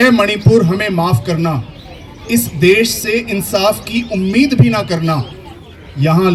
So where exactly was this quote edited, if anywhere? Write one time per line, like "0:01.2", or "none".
none